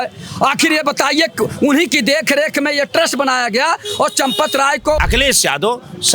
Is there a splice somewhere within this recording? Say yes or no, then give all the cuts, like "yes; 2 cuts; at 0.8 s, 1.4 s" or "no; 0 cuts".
yes; 1 cut; at 5.0 s